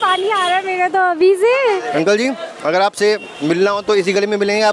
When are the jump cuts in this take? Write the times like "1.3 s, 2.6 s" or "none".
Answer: 1.8 s

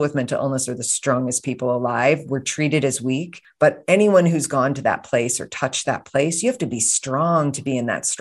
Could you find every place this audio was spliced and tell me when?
3.4 s

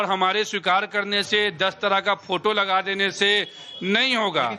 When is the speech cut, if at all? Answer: 1.1 s

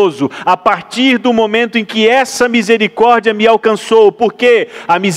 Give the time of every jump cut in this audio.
none

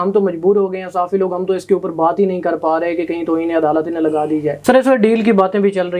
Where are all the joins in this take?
4.6 s

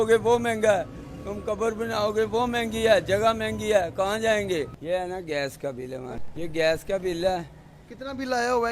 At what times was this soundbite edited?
4.8 s, 6.3 s

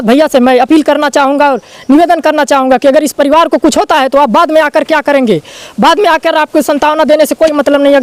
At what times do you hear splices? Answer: none

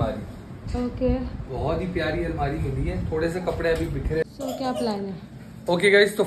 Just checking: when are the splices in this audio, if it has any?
4.3 s

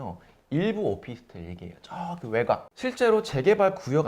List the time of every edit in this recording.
2.7 s

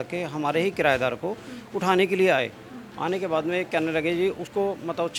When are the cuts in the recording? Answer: none

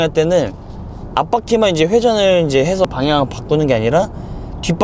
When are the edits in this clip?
2.9 s

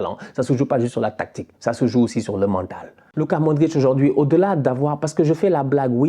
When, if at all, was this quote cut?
3.0 s

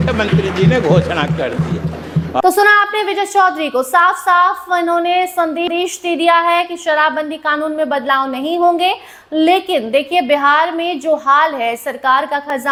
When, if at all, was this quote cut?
none

